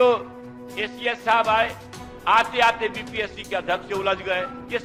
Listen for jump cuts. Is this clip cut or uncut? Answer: uncut